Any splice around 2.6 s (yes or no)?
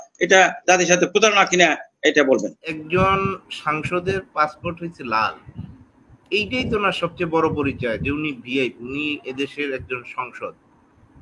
yes